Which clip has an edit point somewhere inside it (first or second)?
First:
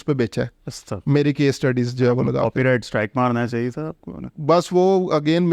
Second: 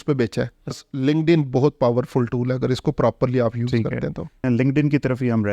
second